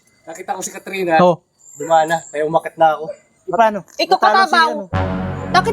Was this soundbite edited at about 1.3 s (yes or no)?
no